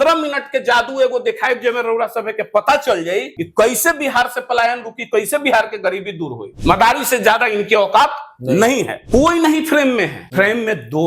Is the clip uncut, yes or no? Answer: no